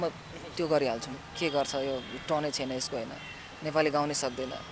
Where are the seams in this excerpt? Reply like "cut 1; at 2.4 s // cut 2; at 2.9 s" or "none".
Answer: cut 1; at 1.2 s